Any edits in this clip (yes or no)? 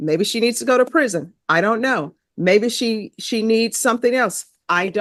no